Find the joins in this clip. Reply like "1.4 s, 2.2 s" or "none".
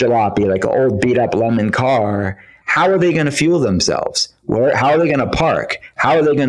none